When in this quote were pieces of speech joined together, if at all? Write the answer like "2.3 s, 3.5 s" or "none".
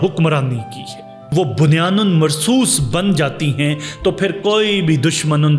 1.2 s